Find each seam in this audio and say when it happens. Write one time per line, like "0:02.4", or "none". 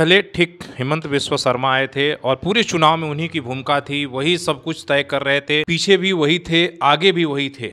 none